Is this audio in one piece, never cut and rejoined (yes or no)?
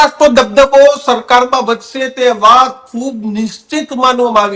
yes